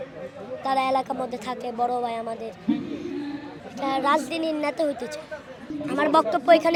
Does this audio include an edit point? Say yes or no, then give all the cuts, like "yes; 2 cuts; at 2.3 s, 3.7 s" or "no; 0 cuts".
no; 0 cuts